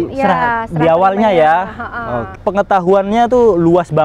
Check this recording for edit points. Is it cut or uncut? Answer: cut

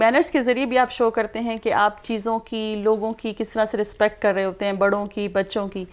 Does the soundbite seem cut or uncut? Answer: uncut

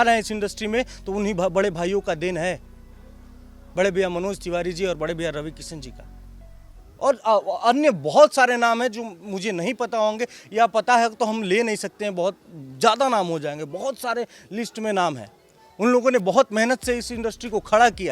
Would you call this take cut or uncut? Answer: uncut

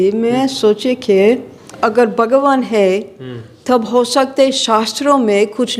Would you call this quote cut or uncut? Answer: cut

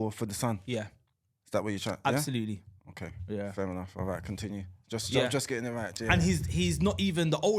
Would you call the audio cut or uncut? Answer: uncut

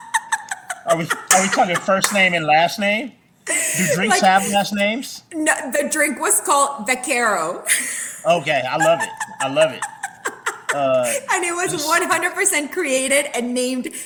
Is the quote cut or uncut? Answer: uncut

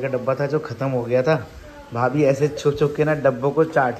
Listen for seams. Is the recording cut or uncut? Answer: uncut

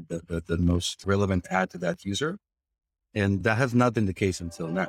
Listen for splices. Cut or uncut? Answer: cut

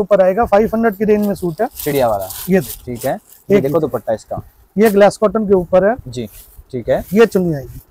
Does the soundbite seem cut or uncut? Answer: uncut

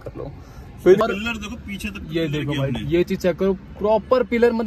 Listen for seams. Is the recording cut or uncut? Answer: cut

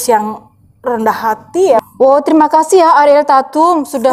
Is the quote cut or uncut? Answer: cut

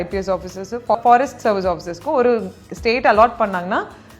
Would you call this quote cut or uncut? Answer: cut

